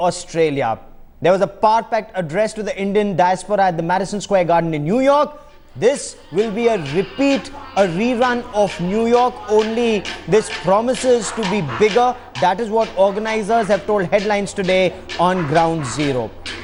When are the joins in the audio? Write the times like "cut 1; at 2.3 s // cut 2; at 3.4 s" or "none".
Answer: none